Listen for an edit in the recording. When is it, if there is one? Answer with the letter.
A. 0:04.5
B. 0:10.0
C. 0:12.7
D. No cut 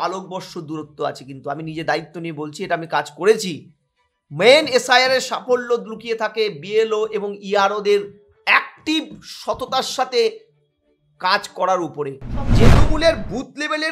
C